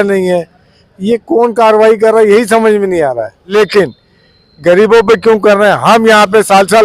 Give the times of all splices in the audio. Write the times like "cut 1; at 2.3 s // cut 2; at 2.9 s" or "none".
cut 1; at 3.5 s